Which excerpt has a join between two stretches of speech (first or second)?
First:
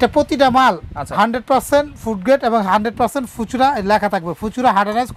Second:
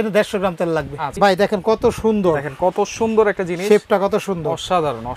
second